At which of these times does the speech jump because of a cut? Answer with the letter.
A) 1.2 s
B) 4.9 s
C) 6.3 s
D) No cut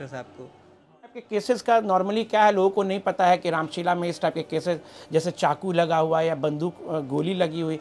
A